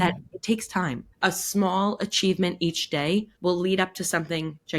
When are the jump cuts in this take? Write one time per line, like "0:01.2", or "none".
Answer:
0:01.0
0:03.3